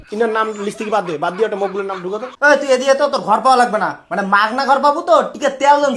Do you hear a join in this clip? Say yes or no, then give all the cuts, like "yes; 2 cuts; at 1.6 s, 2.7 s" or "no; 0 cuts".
yes; 1 cut; at 2.3 s